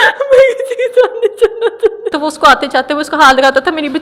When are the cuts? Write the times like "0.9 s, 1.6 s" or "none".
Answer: 2.1 s